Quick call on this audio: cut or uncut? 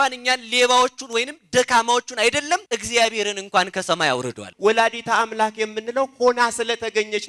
cut